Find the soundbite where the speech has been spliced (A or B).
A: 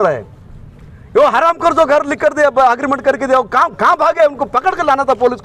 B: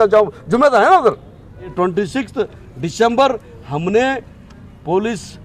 B